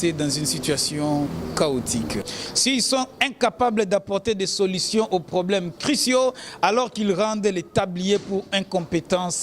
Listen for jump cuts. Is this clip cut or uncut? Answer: cut